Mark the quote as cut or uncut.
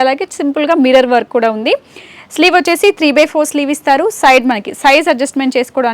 uncut